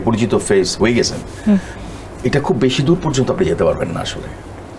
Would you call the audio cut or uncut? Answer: uncut